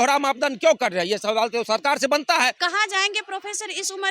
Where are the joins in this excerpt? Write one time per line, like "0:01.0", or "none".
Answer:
0:02.6